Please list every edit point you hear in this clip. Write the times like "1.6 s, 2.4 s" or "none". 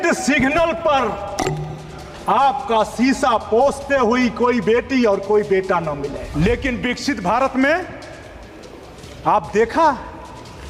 6.3 s

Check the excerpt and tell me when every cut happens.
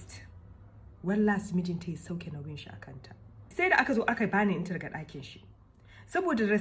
3.5 s

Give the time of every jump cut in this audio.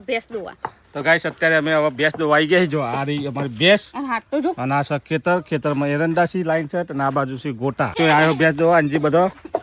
7.9 s

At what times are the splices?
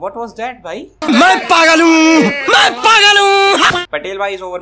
0.9 s, 3.8 s

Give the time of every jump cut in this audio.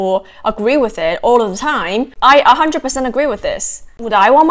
2.1 s

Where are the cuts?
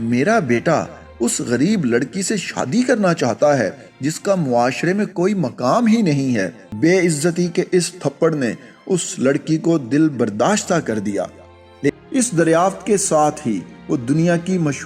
6.6 s, 11.9 s

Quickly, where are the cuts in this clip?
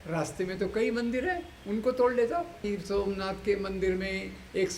2.7 s

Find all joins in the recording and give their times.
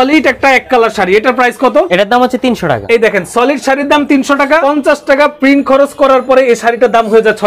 1.9 s, 2.8 s, 4.6 s

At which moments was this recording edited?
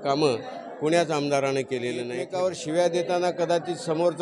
2.2 s

